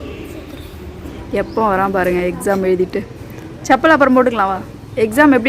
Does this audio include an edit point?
yes; 1 cut; at 1.1 s

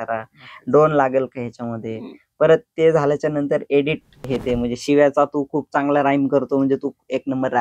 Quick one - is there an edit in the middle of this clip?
yes; 1 cut; at 4.3 s

